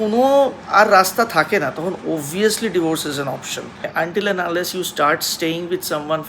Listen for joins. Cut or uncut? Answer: cut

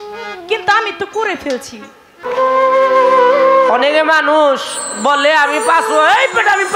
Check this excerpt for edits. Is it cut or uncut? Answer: cut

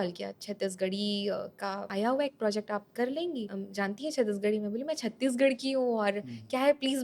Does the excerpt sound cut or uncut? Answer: cut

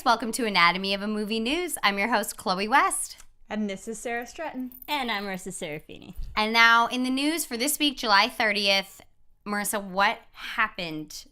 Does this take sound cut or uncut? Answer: uncut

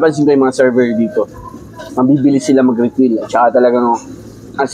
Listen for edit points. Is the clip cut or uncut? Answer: uncut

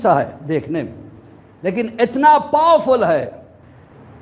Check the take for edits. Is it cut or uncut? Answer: uncut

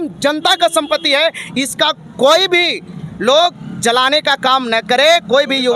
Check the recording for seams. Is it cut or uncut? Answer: uncut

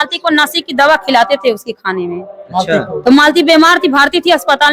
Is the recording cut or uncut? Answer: uncut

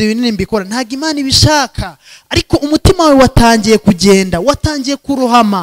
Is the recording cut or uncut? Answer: uncut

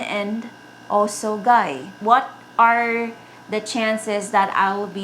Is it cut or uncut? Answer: cut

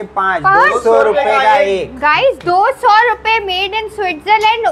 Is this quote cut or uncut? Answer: uncut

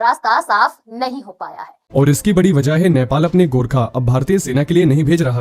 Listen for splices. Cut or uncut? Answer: cut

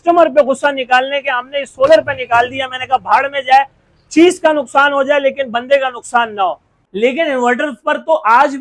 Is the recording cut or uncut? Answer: uncut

